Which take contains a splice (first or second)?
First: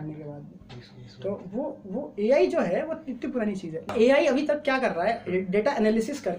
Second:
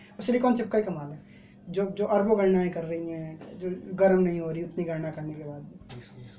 first